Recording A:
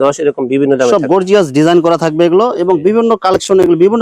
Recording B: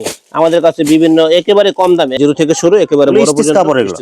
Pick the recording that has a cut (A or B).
B